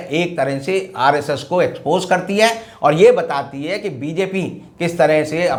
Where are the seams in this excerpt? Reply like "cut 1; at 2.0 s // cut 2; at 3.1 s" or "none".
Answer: none